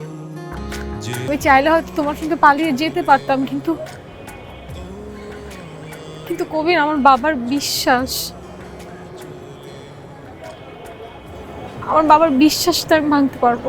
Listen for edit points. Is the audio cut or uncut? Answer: cut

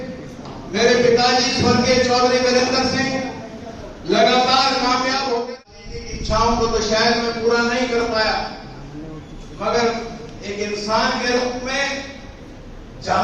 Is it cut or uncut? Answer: cut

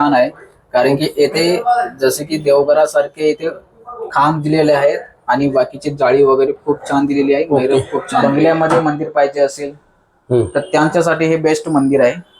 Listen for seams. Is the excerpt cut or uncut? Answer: cut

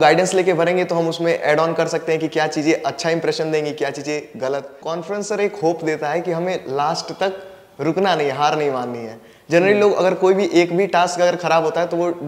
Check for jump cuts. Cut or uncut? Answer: cut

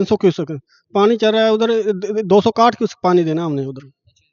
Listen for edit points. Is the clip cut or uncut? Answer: uncut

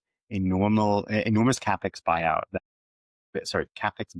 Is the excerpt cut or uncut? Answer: uncut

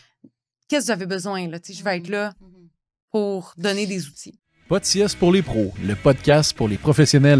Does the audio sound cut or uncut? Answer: cut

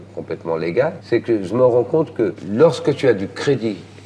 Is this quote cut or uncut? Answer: cut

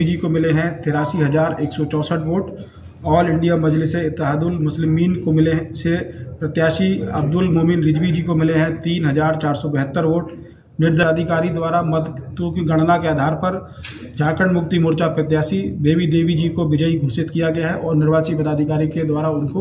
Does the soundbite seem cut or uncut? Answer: cut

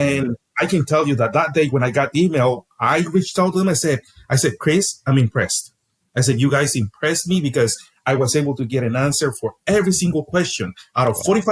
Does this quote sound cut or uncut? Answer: uncut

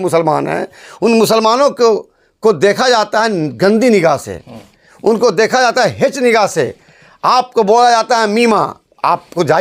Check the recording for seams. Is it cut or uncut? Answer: uncut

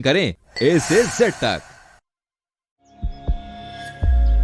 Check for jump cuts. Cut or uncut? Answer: uncut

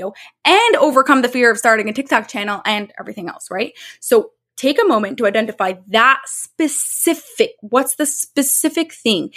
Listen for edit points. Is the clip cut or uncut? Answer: uncut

